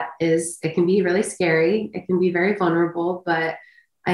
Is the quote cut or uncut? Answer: uncut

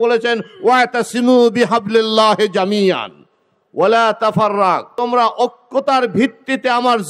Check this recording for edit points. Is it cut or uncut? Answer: cut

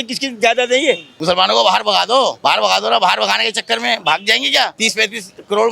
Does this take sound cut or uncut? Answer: cut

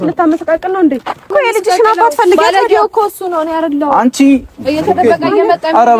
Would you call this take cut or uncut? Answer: cut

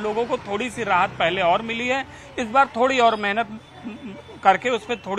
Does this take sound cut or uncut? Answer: uncut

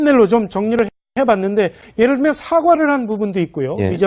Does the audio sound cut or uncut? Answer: cut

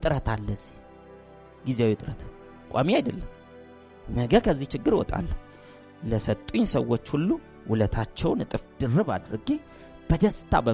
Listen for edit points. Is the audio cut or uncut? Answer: uncut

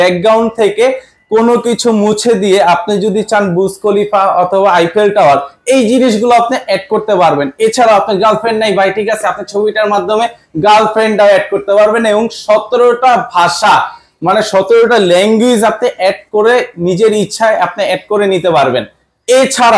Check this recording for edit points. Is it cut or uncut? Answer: uncut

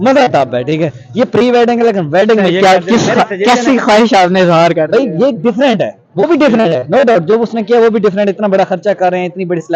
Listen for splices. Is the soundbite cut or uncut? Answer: uncut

